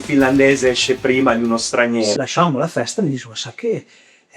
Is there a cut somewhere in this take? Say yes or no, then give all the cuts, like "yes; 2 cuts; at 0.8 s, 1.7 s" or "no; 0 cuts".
yes; 1 cut; at 2.1 s